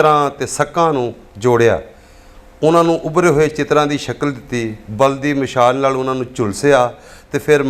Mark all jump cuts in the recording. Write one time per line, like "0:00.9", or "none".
none